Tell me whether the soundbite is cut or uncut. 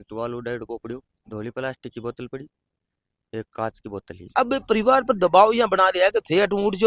cut